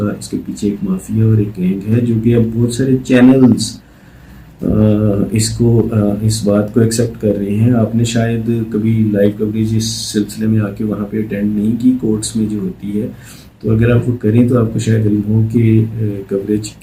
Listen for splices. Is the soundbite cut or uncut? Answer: uncut